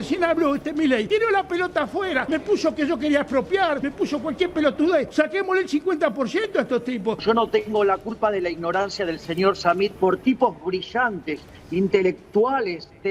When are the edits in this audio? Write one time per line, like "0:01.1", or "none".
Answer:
0:01.1
0:02.2
0:03.9
0:05.1
0:07.2
0:09.9